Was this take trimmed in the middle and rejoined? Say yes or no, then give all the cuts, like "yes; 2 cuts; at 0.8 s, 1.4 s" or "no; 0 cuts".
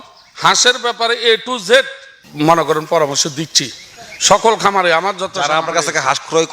yes; 1 cut; at 2.2 s